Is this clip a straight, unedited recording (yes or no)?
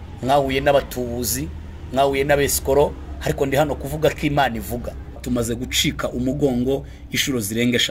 no